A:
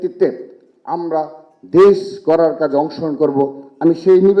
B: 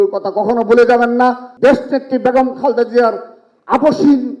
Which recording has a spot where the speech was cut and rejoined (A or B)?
B